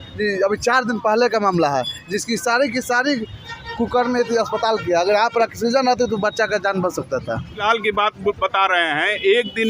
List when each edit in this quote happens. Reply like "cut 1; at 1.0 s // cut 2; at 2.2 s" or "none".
cut 1; at 7.6 s